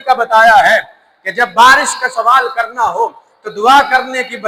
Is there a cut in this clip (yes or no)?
no